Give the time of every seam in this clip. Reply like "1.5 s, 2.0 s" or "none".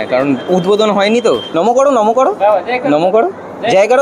1.5 s